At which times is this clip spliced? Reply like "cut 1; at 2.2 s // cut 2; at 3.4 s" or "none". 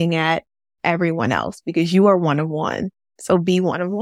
none